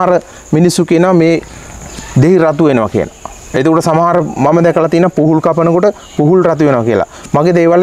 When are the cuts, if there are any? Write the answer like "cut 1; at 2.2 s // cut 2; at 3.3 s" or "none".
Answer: none